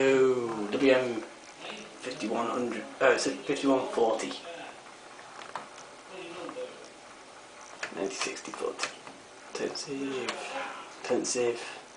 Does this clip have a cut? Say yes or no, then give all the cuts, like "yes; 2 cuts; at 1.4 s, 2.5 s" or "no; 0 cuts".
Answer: no; 0 cuts